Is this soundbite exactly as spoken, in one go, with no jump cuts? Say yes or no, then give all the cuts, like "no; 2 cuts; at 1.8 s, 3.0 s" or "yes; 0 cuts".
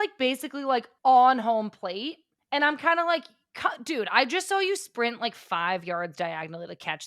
no; 2 cuts; at 0.9 s, 2.3 s